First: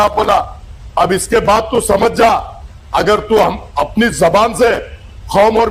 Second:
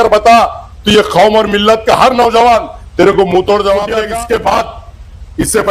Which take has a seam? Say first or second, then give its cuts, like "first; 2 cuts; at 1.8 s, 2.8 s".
second; 1 cut; at 4.0 s